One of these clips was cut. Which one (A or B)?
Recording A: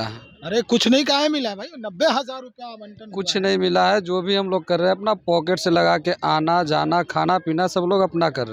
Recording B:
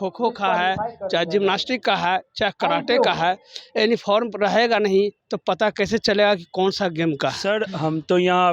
B